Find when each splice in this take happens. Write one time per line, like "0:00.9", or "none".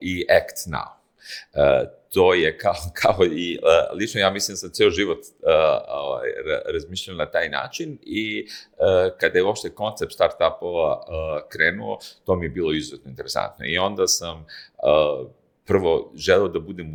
none